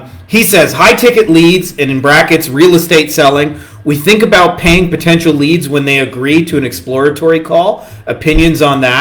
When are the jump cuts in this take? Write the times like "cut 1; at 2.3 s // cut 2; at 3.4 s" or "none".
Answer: none